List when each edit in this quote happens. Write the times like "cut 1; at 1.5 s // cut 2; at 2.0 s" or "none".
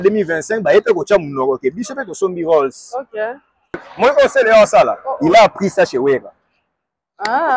cut 1; at 3.9 s